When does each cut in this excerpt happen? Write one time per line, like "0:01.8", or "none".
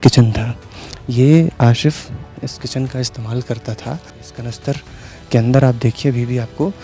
0:04.2